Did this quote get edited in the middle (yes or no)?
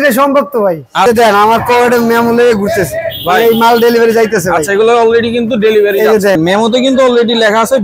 yes